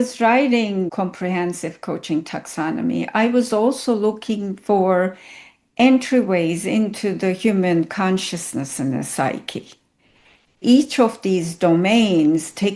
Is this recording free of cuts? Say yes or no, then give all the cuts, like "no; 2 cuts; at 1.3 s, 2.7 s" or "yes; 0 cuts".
no; 2 cuts; at 0.9 s, 10.6 s